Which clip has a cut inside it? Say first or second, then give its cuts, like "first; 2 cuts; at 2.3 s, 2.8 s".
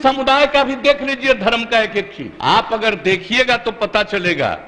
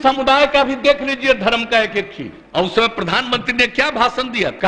second; 1 cut; at 2.3 s